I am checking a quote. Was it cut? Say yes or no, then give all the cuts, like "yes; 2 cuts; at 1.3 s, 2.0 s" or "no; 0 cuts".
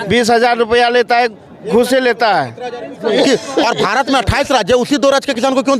yes; 1 cut; at 2.9 s